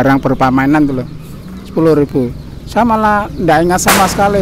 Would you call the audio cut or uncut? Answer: uncut